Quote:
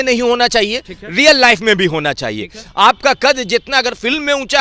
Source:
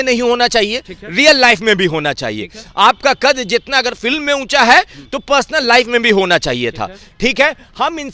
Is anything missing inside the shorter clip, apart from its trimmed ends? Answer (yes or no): no